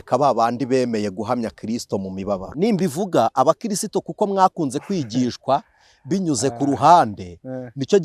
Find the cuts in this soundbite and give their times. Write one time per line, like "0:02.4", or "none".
0:02.5